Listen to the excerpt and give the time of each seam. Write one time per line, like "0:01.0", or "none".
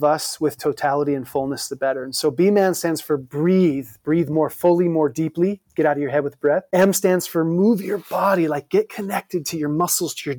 0:06.6